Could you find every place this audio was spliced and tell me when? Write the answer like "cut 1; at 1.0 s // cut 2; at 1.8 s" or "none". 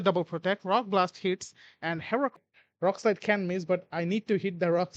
cut 1; at 2.4 s